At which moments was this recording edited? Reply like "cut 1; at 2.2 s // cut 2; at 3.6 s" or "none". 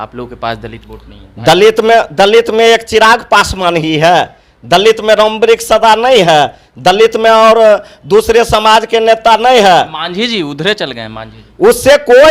none